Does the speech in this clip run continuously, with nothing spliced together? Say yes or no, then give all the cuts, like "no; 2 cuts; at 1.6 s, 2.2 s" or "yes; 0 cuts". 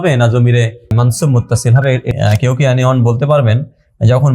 no; 2 cuts; at 0.9 s, 2.1 s